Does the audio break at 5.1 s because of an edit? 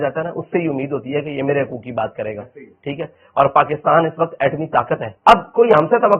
yes; 1 cut; at 5.1 s

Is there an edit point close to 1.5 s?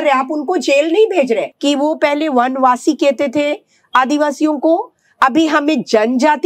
yes; 1 cut; at 1.5 s

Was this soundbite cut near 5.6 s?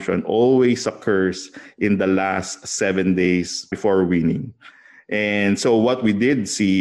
no; 1 cut; at 3.7 s

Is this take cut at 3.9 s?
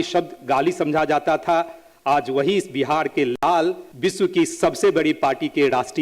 yes; 1 cut; at 3.9 s

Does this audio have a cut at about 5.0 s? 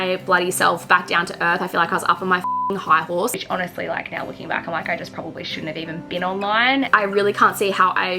no; 2 cuts; at 3.3 s, 6.9 s

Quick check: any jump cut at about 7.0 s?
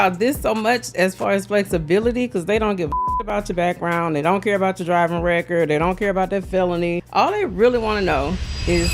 yes; 1 cut; at 7.0 s

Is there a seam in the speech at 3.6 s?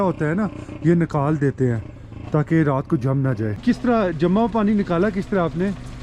yes; 1 cut; at 3.6 s

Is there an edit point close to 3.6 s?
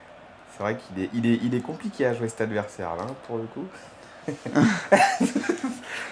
yes; 1 cut; at 3.6 s

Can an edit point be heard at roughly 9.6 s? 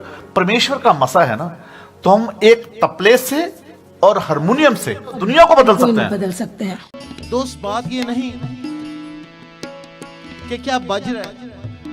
no; 2 cuts; at 5.2 s, 7.1 s

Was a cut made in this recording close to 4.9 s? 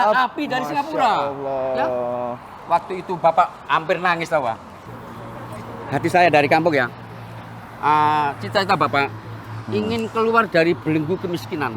yes; 1 cut; at 4.9 s

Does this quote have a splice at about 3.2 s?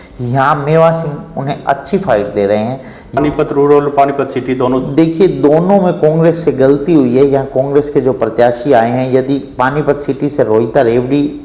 yes; 1 cut; at 3.2 s

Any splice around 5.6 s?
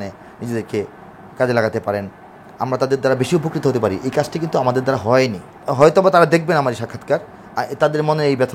yes; 1 cut; at 5.6 s

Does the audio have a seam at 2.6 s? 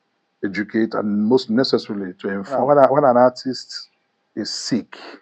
yes; 1 cut; at 2.6 s

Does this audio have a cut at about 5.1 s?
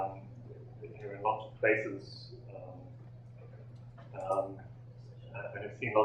no; 1 cut; at 1.7 s

